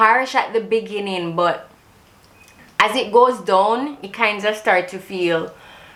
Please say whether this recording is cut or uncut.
uncut